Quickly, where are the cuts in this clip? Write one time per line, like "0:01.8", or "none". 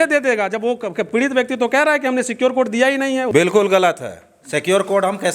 0:03.3